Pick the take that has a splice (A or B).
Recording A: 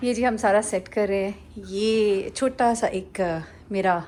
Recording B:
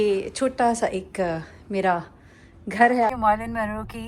B